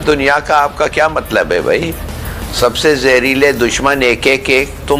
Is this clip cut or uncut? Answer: uncut